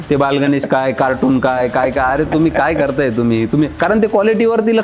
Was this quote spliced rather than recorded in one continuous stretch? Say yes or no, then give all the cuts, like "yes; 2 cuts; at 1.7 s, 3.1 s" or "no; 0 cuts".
yes; 1 cut; at 3.7 s